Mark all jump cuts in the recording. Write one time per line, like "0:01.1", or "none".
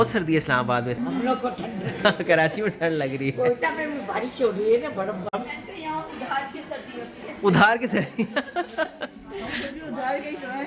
0:01.0
0:05.4